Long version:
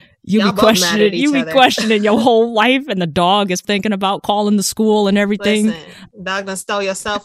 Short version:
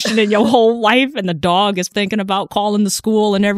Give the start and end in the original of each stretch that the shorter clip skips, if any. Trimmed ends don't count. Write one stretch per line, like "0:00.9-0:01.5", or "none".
none